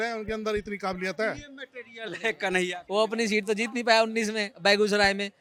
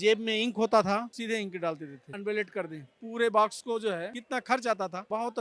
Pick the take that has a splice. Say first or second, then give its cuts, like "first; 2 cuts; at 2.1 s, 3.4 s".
second; 1 cut; at 1.1 s